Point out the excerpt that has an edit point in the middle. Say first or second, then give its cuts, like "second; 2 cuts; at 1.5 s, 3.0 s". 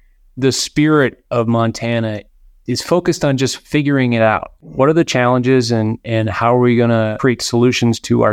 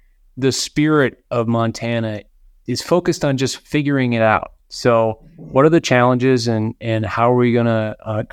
first; 2 cuts; at 4.6 s, 7.1 s